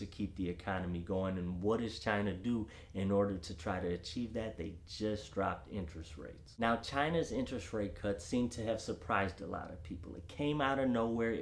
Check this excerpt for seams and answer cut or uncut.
uncut